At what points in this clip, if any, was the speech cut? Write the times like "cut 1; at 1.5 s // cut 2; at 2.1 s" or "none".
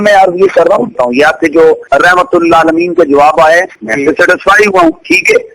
cut 1; at 0.9 s // cut 2; at 1.8 s // cut 3; at 3.8 s